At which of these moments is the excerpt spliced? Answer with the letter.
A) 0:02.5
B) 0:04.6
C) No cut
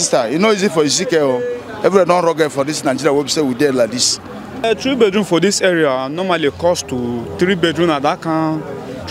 B